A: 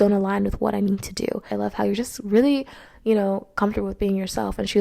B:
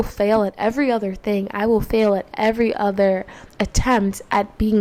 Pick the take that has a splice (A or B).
A